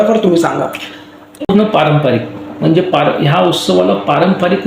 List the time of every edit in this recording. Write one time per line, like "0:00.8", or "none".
0:01.5